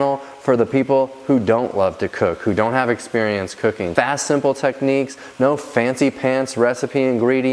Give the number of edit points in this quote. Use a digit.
1